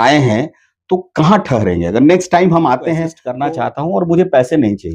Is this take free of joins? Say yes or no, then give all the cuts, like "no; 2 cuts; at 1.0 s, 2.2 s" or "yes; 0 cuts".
no; 1 cut; at 3.2 s